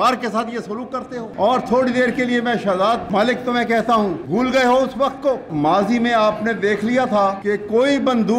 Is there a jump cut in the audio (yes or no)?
yes